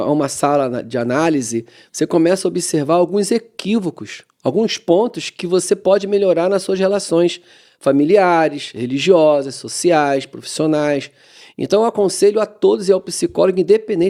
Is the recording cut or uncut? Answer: uncut